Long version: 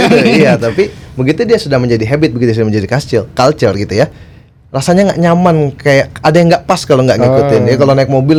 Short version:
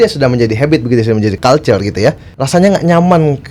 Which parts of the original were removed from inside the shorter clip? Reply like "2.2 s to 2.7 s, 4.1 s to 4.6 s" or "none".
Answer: 2.9 s to 3.3 s, 4.3 s to 4.7 s